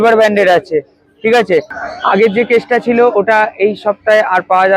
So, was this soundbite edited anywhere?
yes; 1 cut; at 1.8 s

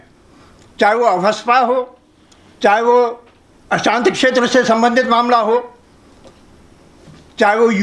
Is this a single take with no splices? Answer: yes; 0 cuts

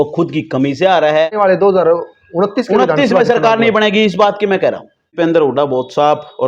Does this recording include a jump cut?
yes; 2 cuts; at 1.3 s, 5.0 s

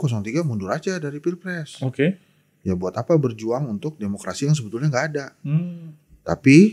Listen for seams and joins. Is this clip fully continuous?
yes; 0 cuts

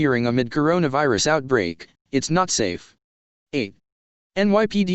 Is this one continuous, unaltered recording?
no; 1 cut; at 3.7 s

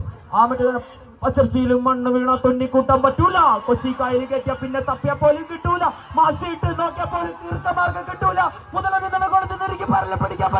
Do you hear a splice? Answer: no; 0 cuts

